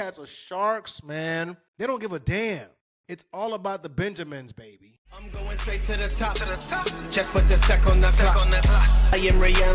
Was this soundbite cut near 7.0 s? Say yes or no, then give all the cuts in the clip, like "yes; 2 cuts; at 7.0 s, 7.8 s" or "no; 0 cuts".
no; 2 cuts; at 1.6 s, 5.2 s